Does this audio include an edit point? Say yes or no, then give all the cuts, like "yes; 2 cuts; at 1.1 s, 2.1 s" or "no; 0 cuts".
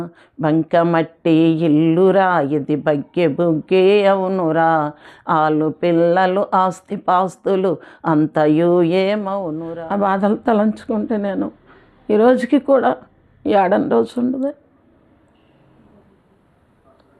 yes; 1 cut; at 9.5 s